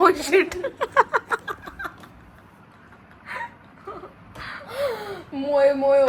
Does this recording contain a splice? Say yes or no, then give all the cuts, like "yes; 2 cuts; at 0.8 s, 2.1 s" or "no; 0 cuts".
no; 0 cuts